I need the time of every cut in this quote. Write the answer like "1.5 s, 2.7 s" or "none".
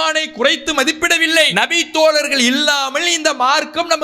1.5 s